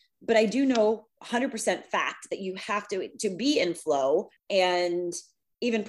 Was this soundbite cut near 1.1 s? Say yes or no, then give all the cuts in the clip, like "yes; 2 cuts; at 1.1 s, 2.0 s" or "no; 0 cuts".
no; 1 cut; at 4.4 s